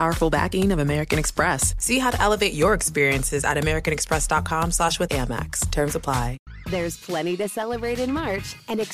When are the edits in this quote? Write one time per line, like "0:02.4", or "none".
0:06.5